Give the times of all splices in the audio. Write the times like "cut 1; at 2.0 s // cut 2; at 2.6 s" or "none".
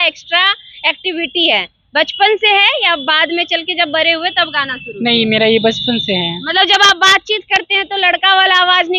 none